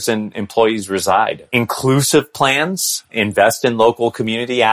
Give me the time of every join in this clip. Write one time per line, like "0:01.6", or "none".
none